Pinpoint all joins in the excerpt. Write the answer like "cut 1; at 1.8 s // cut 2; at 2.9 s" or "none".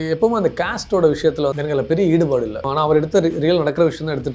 cut 1; at 1.6 s // cut 2; at 2.6 s